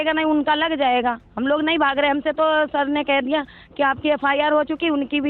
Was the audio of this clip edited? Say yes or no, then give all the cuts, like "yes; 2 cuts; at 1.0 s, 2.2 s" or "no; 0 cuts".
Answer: no; 0 cuts